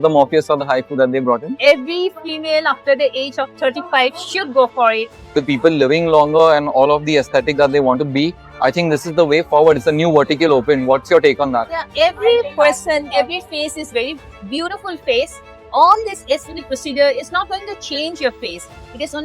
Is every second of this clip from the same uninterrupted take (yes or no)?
no